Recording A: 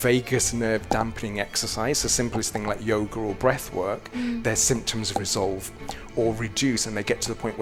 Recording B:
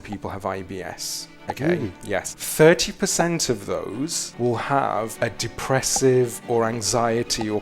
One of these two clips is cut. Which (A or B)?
B